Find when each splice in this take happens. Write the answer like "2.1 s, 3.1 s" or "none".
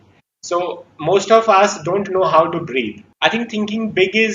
3.0 s